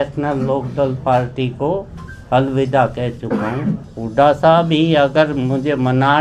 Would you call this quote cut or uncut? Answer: cut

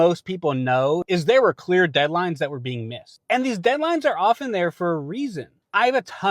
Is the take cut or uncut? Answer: uncut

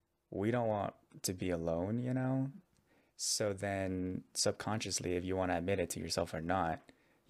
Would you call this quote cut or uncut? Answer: uncut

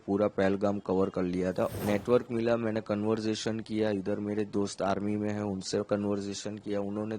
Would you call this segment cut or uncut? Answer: cut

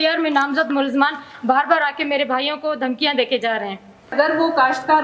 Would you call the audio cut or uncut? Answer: cut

